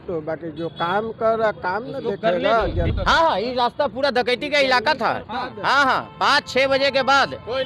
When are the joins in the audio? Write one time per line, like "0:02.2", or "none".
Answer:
0:02.9